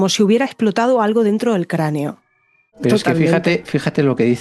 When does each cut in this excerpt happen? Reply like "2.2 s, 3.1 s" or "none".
2.7 s